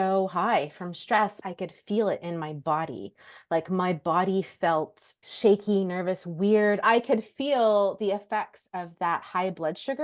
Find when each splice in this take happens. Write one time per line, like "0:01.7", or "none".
0:01.4
0:05.2
0:06.8